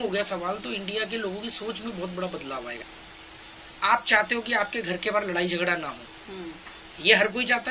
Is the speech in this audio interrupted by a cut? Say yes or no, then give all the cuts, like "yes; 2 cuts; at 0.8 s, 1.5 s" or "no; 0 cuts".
yes; 1 cut; at 2.8 s